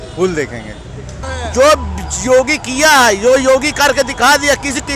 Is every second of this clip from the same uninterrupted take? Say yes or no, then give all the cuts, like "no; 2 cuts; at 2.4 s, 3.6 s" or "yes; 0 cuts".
no; 1 cut; at 1.1 s